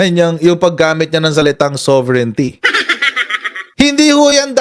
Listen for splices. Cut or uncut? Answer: cut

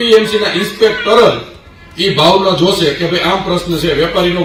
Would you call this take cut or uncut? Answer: uncut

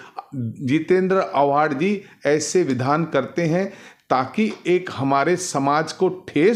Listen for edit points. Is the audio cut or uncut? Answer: uncut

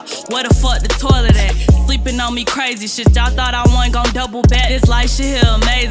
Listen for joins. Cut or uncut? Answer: uncut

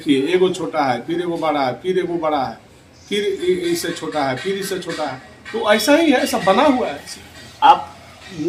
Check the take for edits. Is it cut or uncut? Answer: uncut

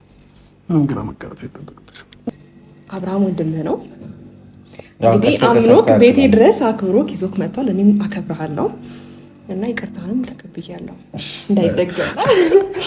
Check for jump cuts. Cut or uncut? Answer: cut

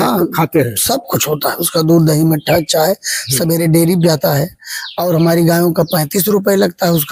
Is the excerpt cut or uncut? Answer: uncut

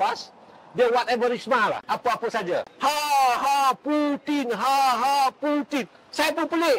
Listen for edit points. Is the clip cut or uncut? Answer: cut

